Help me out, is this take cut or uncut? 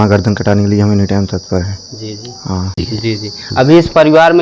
cut